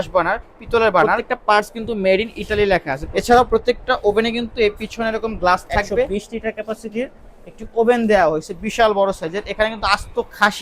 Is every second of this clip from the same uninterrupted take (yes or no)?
no